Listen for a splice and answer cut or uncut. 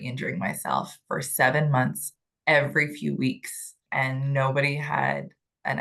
cut